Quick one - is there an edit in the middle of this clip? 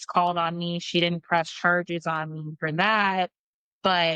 no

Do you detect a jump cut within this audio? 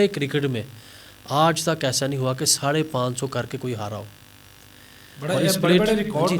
no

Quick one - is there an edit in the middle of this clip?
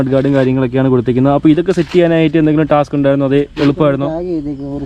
no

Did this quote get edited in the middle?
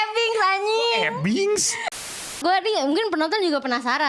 yes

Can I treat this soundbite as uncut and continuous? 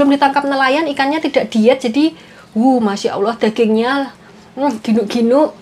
yes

